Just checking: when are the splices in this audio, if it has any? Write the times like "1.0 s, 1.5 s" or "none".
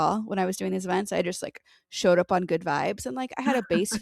none

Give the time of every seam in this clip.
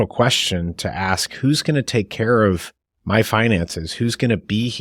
none

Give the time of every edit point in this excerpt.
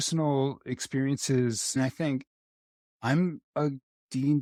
none

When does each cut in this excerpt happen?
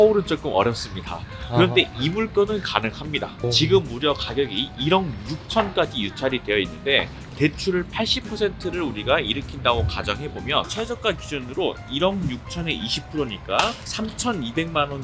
3.3 s

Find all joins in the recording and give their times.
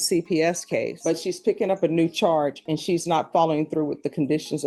none

